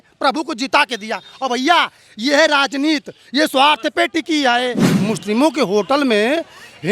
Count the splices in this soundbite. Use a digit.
1